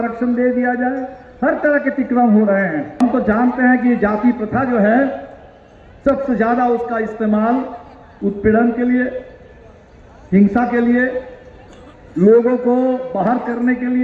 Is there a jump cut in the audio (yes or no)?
yes